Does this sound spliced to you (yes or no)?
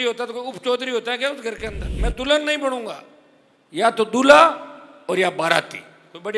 yes